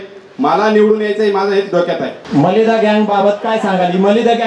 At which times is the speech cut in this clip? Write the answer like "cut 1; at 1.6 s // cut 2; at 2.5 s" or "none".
cut 1; at 2.2 s